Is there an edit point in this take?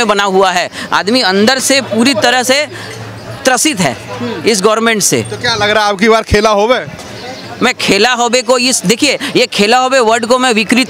no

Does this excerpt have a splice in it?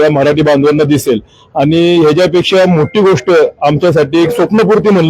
no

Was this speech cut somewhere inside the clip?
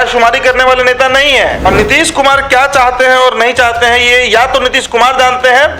yes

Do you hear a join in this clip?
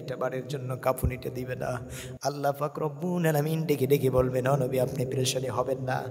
no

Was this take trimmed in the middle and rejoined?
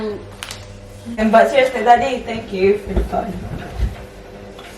yes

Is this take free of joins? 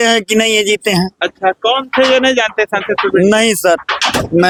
yes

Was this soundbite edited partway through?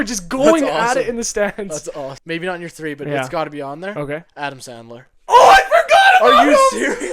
yes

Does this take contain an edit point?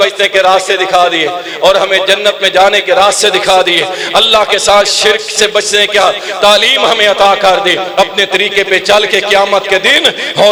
no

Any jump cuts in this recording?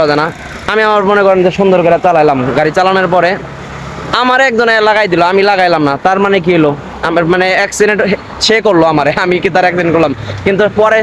no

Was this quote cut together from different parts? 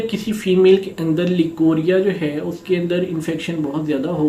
no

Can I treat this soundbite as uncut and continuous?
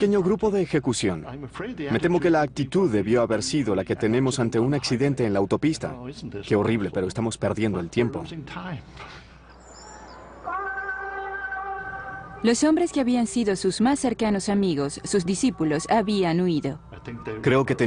no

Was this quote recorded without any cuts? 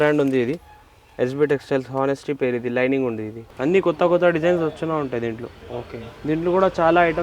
no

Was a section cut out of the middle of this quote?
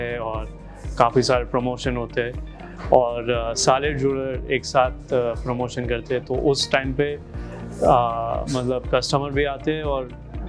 no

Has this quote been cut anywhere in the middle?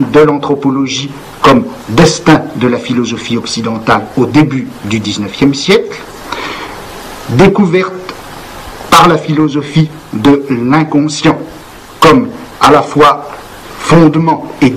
yes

